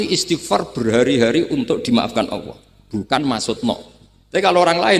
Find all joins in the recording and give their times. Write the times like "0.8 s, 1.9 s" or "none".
none